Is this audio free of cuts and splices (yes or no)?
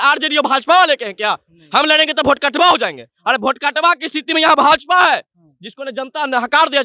yes